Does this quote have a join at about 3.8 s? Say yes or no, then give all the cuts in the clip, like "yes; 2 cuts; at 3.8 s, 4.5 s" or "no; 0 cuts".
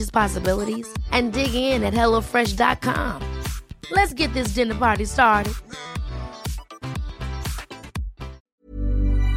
no; 1 cut; at 8.4 s